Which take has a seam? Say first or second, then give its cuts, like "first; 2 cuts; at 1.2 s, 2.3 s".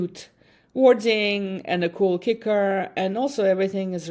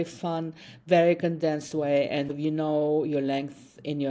second; 1 cut; at 2.3 s